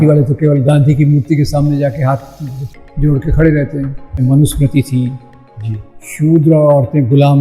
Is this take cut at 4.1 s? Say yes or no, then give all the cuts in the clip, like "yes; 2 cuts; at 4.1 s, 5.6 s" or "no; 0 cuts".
yes; 1 cut; at 4.1 s